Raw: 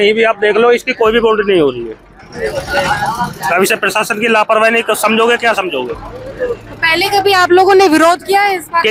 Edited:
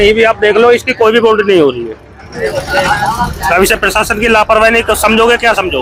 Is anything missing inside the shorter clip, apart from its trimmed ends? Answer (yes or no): no